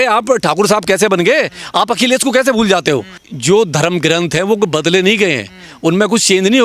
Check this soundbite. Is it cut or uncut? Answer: cut